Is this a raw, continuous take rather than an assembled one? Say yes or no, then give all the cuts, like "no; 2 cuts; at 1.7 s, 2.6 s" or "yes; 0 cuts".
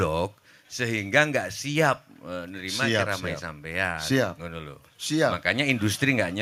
yes; 0 cuts